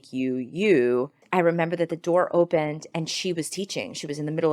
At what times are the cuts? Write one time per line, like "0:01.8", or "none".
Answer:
0:01.2